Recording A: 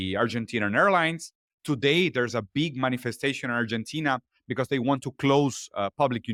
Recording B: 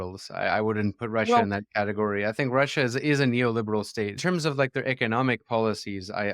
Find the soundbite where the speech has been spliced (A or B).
B